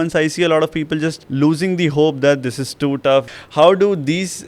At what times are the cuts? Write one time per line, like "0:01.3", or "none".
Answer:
0:01.2
0:03.3